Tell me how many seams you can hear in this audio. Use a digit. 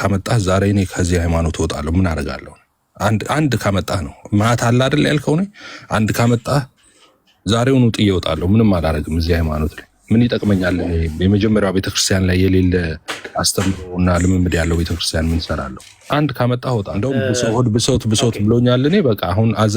1